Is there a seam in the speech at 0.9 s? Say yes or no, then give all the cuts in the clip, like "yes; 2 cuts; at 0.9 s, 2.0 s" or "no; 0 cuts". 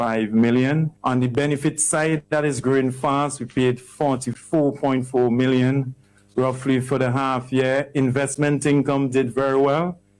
yes; 2 cuts; at 0.9 s, 4.3 s